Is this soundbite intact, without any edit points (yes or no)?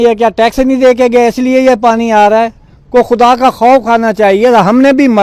yes